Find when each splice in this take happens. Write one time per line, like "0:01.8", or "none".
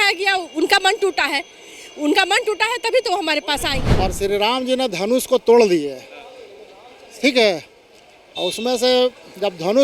0:03.8